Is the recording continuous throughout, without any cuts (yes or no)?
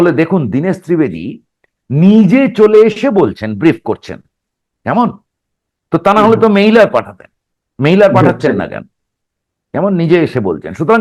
yes